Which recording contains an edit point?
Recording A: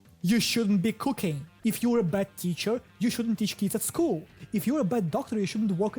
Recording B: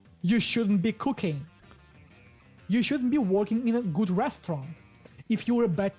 A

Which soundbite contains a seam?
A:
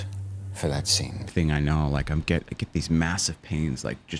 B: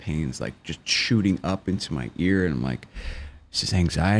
A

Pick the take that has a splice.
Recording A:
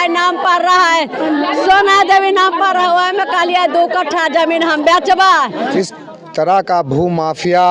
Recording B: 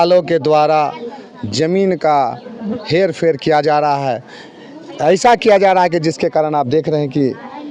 A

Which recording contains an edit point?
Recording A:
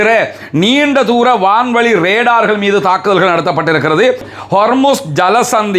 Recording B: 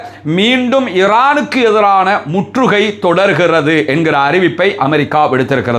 A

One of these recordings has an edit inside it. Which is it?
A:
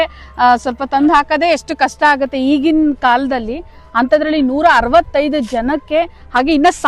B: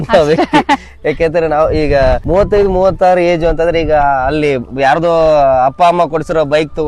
B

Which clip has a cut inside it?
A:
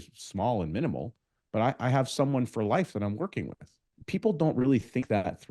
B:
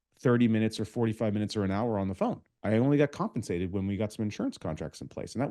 A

